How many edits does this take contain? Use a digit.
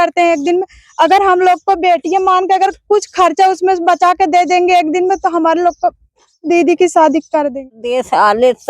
1